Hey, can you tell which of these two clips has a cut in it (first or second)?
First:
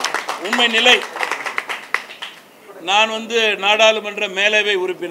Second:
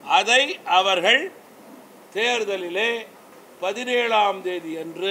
first